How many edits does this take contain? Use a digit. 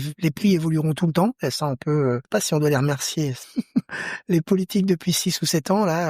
2